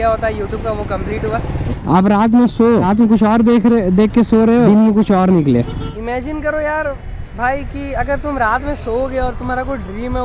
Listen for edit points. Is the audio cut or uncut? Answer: cut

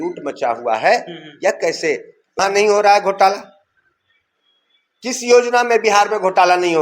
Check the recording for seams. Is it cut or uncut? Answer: cut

